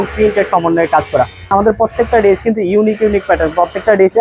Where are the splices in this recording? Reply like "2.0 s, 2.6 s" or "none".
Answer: 1.5 s